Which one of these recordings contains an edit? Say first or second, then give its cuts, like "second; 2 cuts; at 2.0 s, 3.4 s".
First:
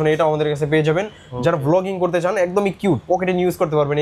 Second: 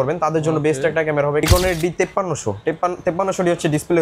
second; 1 cut; at 1.4 s